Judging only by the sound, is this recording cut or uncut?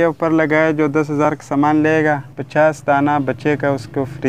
cut